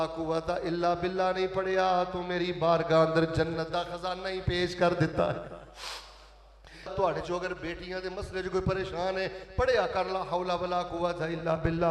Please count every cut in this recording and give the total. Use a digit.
1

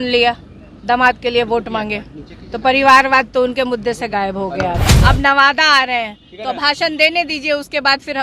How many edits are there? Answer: 1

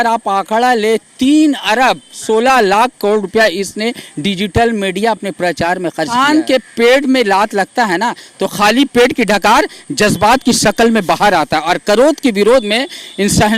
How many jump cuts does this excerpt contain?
1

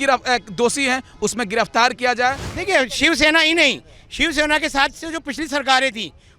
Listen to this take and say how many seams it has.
1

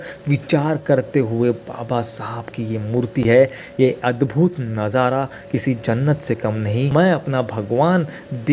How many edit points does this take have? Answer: 0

